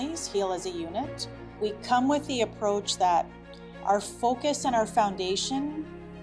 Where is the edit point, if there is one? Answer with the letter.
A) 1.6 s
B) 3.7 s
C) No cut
A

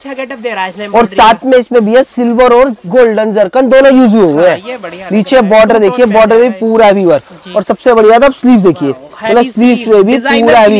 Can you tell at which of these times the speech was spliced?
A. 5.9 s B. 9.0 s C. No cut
C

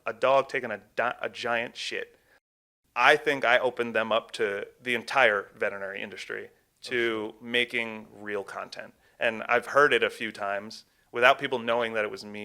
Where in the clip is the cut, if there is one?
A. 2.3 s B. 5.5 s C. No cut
A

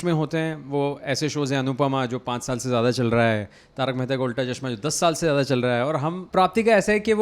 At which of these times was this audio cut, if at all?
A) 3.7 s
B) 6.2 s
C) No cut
B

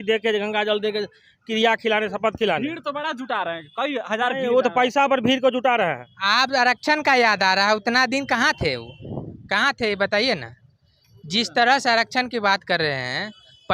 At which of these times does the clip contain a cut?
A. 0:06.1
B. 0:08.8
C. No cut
A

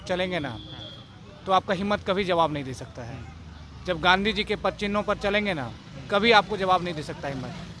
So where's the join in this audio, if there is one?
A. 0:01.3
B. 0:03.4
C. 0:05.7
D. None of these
D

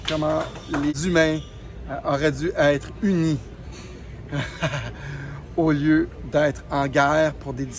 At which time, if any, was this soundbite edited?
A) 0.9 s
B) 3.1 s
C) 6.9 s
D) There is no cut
A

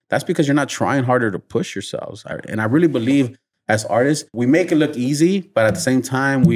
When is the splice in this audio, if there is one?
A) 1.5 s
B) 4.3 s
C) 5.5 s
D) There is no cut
B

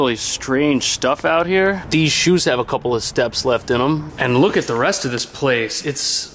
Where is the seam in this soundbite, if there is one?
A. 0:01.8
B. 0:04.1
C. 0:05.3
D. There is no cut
B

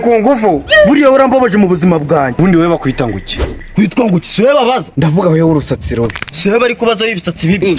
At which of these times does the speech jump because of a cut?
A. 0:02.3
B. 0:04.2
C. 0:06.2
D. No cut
A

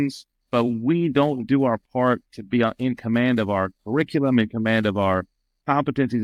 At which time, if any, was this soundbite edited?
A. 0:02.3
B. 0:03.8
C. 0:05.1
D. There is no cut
D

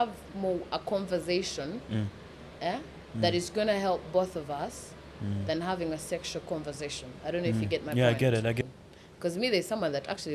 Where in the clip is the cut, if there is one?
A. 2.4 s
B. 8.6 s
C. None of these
B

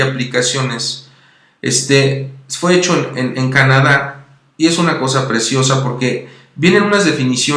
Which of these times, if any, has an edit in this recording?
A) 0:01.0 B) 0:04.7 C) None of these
B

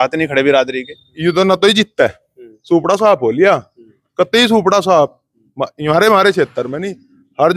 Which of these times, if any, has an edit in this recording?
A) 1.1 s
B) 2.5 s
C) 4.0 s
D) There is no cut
A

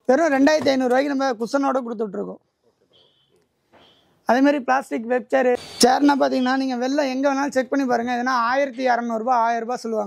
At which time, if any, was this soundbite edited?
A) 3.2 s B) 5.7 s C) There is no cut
B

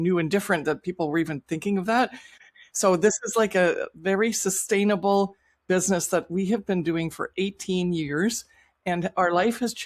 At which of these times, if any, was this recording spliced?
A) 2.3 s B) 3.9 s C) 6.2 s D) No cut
A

